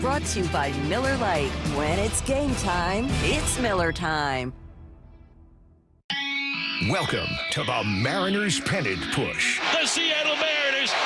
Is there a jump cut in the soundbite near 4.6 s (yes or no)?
no